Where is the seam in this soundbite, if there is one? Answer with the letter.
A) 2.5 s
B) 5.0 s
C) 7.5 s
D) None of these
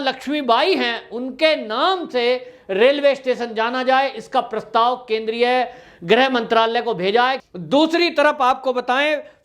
C